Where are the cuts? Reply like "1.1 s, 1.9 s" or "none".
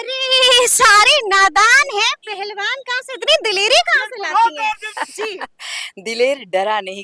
4.9 s